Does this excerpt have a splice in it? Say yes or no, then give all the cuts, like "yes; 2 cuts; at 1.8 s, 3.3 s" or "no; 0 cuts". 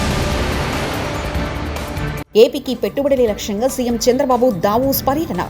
yes; 1 cut; at 2.2 s